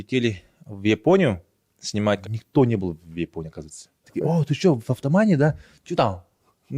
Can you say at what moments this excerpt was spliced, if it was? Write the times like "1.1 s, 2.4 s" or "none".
2.2 s, 4.1 s